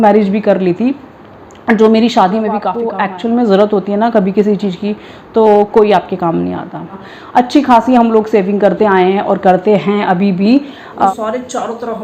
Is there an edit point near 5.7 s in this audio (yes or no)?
no